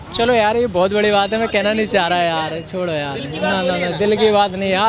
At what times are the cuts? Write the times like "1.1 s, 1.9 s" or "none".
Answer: none